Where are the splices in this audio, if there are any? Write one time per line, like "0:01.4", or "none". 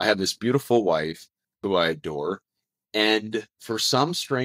0:01.6